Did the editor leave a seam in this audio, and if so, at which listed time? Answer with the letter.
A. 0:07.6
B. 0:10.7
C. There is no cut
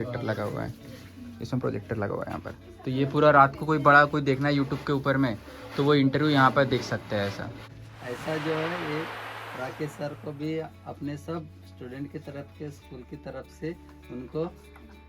A